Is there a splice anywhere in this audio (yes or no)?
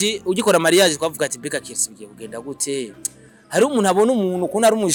no